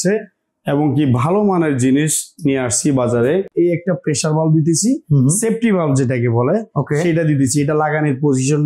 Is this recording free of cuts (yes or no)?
no